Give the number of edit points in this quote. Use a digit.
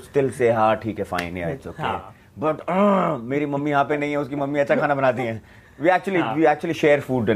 0